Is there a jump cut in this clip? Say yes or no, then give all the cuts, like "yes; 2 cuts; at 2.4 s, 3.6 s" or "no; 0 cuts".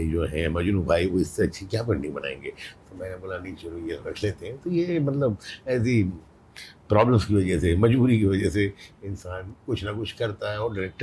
no; 0 cuts